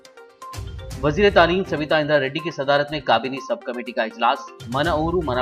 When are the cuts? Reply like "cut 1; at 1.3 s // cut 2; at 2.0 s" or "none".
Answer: cut 1; at 0.9 s